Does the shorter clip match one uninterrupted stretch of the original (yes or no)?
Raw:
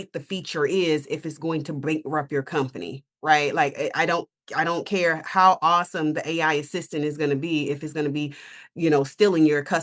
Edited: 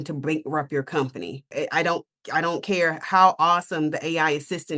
no